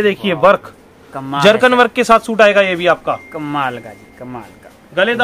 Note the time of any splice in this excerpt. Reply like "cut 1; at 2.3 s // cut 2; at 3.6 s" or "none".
none